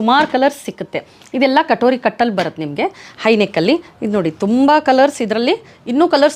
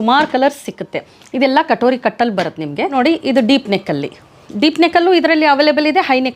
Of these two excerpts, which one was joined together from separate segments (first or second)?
second